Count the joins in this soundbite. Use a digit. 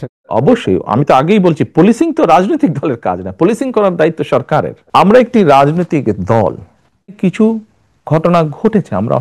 1